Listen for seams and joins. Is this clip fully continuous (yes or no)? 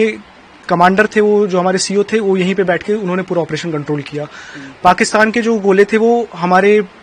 yes